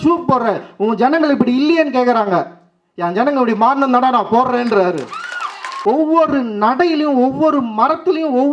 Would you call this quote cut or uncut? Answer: cut